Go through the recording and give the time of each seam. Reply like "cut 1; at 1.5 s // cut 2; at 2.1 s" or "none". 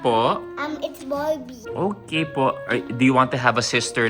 cut 1; at 1.6 s